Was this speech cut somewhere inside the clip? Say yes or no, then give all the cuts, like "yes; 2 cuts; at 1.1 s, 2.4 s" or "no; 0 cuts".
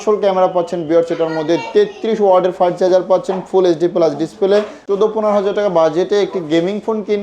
yes; 1 cut; at 4.8 s